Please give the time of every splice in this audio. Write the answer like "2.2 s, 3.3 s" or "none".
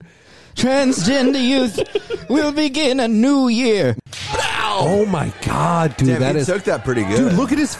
4.0 s